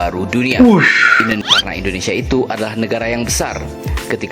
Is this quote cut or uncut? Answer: cut